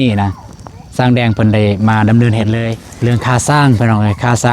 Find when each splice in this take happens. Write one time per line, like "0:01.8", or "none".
0:02.8